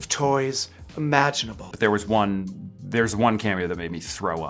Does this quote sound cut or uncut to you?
cut